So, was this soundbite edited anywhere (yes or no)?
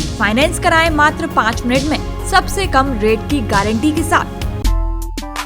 yes